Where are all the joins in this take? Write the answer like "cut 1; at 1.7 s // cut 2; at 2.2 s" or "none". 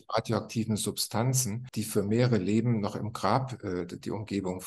cut 1; at 1.6 s